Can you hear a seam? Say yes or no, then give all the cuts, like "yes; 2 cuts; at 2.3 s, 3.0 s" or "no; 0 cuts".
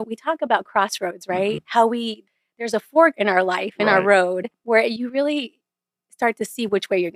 yes; 2 cuts; at 1.6 s, 4.5 s